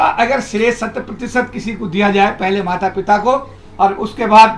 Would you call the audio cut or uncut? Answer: uncut